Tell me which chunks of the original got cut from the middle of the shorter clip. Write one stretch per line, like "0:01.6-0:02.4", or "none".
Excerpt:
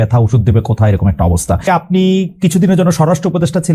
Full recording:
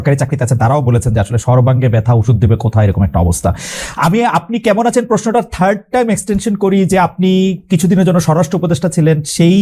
0:03.6-0:07.0